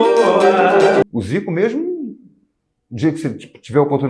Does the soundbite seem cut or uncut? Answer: cut